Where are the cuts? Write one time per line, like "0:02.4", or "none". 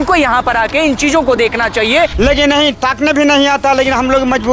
0:02.1